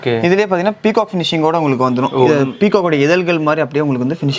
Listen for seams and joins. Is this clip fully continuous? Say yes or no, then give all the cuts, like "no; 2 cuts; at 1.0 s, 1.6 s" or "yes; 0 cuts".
yes; 0 cuts